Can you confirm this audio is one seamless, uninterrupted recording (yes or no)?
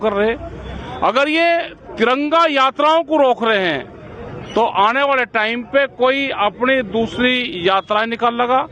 yes